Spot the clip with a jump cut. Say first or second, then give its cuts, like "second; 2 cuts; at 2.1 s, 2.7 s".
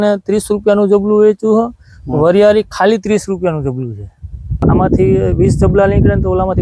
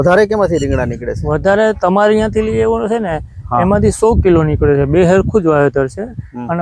first; 1 cut; at 4.6 s